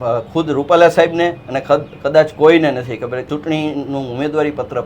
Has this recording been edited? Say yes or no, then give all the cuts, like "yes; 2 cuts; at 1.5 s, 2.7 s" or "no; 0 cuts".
yes; 1 cut; at 3.1 s